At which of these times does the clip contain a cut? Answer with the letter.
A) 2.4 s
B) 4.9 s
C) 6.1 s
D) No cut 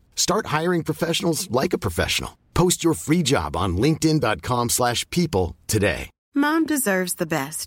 C